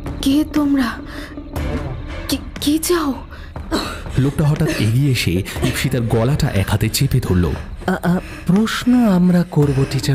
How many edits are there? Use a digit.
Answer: 1